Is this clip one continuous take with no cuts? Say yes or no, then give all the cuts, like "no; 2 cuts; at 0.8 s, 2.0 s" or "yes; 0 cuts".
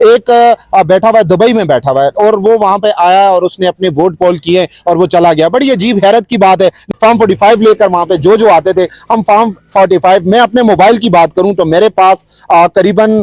no; 1 cut; at 6.9 s